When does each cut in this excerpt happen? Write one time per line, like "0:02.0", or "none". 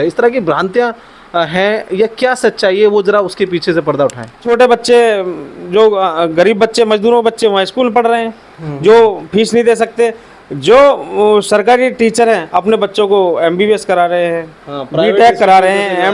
0:04.4